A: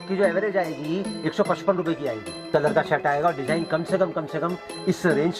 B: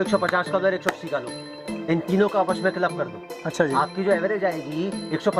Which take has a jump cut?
A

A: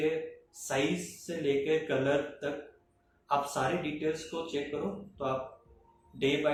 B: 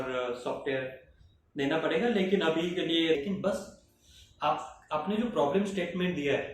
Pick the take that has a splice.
B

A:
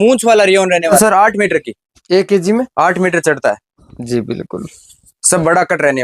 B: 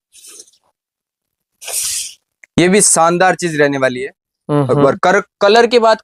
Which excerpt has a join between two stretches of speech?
A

